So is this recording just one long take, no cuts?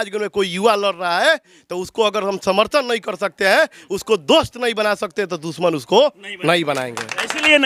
yes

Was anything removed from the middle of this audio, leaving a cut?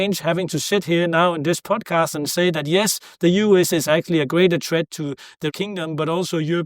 yes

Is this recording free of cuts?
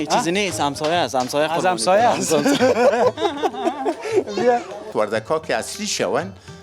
no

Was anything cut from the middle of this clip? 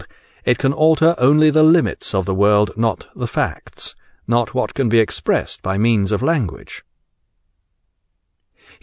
yes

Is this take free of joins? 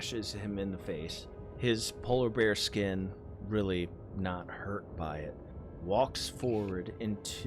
no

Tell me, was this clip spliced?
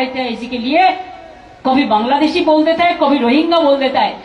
no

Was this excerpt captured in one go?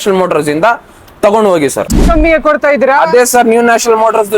no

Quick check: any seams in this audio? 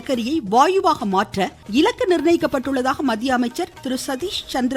yes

